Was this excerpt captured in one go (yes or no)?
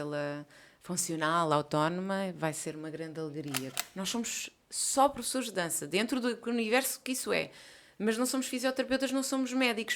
no